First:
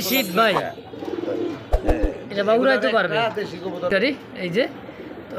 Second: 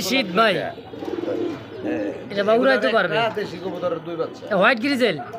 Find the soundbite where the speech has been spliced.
first; 1 cut; at 3.9 s

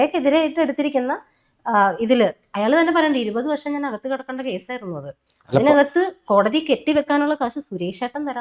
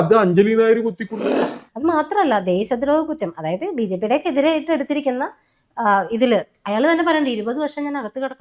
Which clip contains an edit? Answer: second; 1 cut; at 1.4 s

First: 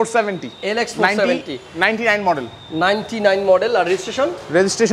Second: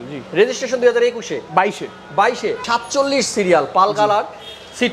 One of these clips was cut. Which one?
second; 1 cut; at 2.6 s

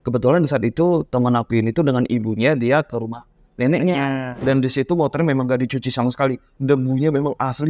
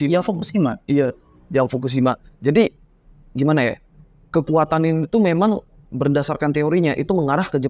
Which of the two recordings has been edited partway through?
first; 1 cut; at 4.3 s

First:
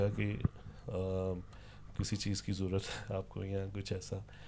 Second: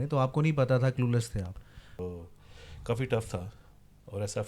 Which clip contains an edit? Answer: second; 1 cut; at 2.0 s

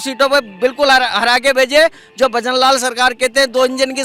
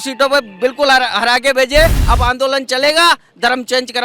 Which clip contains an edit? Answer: second; 1 cut; at 2.0 s

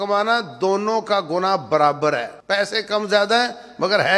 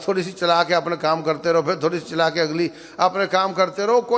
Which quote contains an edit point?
first; 1 cut; at 2.3 s

